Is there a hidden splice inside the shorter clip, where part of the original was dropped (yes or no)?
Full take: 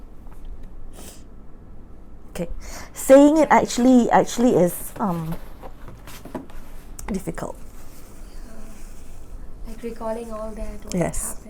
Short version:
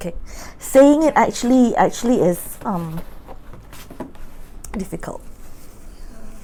no